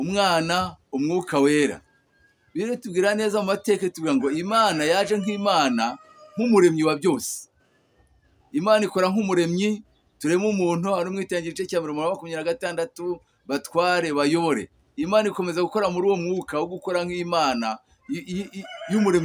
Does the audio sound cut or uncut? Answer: uncut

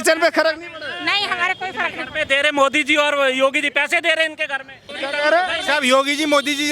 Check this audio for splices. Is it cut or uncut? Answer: cut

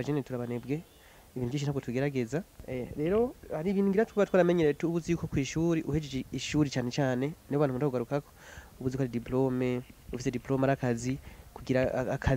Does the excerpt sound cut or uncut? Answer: cut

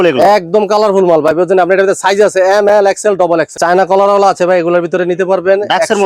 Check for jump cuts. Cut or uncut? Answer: cut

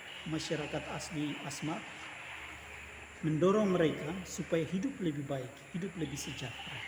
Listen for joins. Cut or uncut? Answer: uncut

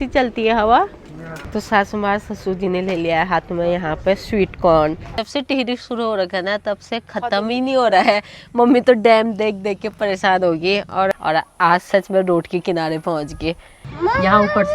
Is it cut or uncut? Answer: cut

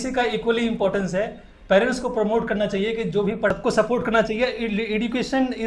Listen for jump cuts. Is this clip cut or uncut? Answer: cut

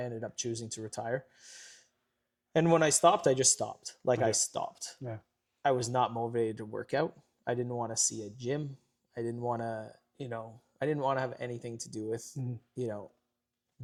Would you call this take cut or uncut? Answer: uncut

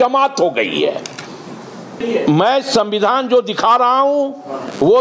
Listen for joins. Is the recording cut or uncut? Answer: cut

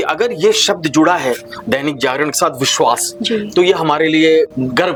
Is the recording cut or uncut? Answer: uncut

